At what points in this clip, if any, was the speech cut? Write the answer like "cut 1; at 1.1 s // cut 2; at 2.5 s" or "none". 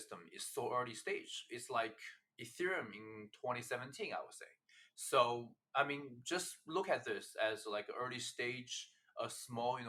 none

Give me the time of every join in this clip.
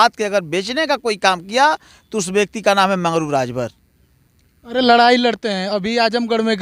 none

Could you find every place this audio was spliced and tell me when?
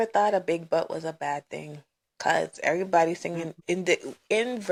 none

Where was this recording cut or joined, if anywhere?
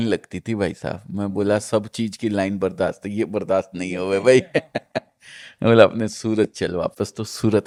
none

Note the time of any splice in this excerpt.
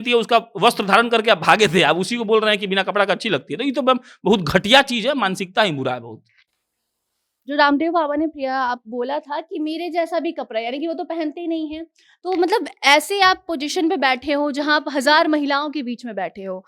none

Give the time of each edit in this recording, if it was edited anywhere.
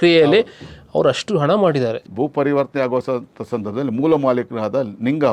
cut 1; at 2.0 s

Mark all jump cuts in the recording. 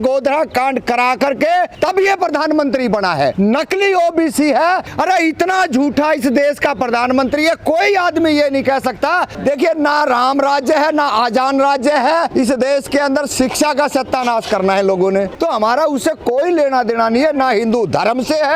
cut 1; at 1.7 s // cut 2; at 3.3 s // cut 3; at 4.9 s // cut 4; at 9.3 s // cut 5; at 12.3 s // cut 6; at 15.3 s

